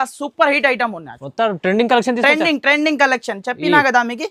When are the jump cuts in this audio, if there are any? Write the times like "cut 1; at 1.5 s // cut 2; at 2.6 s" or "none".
none